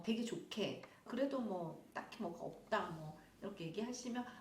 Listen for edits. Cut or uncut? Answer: cut